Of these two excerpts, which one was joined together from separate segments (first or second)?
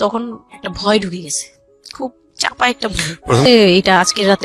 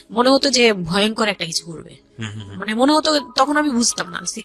first